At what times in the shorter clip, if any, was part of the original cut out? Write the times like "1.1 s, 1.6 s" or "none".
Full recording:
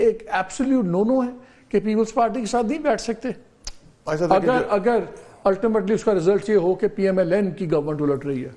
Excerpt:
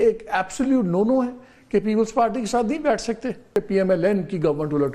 3.5 s